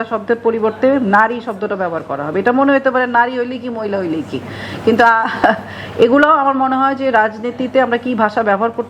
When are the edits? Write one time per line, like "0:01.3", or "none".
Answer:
none